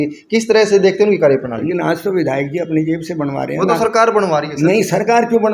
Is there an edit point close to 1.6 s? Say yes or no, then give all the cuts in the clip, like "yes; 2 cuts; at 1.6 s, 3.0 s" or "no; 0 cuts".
yes; 1 cut; at 1.6 s